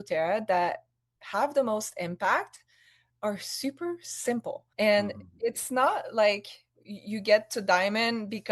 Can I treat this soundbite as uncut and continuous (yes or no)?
no